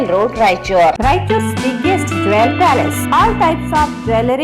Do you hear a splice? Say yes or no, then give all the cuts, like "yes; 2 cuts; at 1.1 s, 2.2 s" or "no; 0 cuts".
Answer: yes; 1 cut; at 0.9 s